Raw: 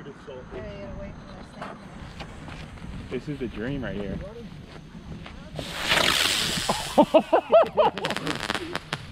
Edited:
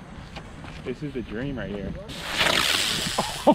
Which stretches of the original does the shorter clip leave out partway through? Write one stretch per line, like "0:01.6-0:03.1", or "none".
0:02.7-0:03.1
0:04.4-0:05.6